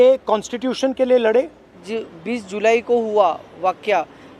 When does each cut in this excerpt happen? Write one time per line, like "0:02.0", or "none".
0:01.8